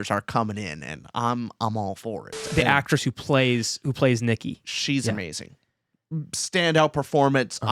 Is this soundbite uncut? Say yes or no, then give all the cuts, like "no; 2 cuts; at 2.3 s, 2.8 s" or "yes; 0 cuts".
no; 1 cut; at 2.4 s